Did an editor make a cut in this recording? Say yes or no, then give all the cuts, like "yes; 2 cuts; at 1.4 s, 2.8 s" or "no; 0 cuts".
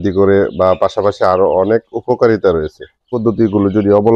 yes; 1 cut; at 3.1 s